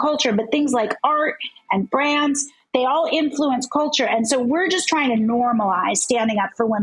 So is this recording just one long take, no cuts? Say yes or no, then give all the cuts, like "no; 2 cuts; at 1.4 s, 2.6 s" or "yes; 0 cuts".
yes; 0 cuts